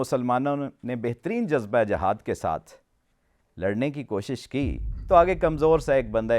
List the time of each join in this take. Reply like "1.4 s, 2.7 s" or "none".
4.9 s